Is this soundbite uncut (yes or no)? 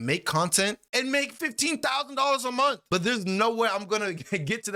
yes